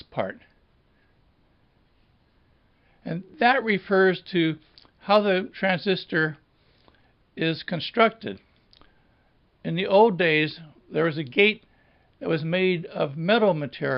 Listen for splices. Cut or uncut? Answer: uncut